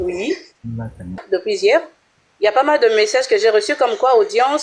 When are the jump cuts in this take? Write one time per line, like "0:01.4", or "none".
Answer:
0:01.2